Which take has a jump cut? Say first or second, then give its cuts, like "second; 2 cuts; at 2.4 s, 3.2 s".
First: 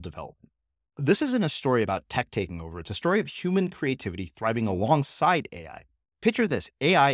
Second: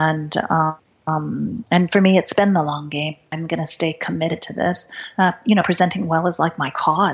second; 2 cuts; at 0.9 s, 3.2 s